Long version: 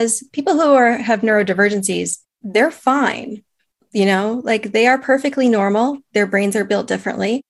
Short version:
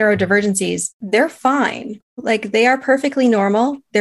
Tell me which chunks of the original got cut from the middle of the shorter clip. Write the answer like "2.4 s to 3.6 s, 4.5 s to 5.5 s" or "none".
2.2 s to 2.3 s, 3.6 s to 4.4 s